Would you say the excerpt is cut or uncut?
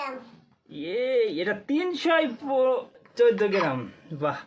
cut